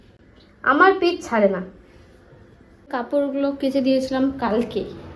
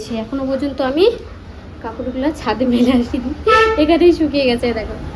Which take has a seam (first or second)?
first